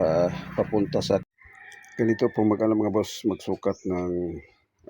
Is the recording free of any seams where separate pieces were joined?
no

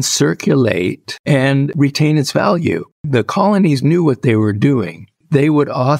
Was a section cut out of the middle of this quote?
yes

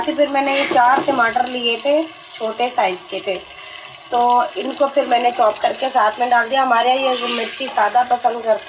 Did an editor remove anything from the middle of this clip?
no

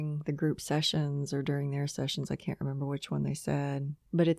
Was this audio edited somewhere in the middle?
no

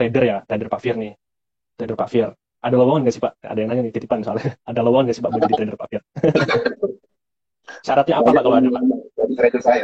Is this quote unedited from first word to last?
yes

